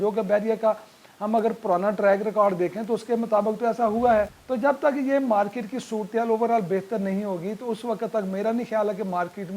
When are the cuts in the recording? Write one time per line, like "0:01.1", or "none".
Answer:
0:04.4